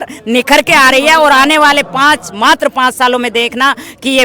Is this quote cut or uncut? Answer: uncut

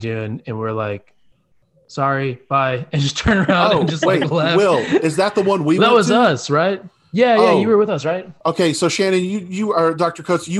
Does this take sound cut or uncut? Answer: uncut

